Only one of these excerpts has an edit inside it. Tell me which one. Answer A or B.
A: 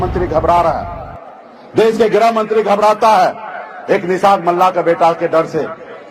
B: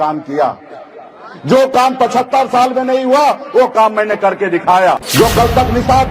B